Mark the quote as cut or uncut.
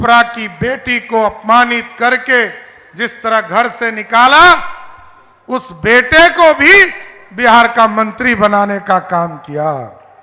uncut